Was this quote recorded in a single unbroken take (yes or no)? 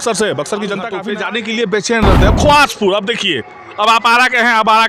no